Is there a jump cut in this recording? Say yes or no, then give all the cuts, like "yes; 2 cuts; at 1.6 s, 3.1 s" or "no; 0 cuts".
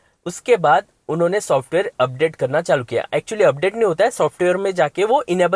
no; 0 cuts